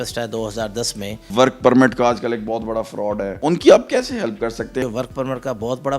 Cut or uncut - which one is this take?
cut